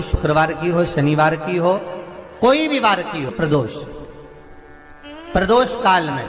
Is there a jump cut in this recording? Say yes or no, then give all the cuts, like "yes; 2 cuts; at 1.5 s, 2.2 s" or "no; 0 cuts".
yes; 1 cut; at 3.3 s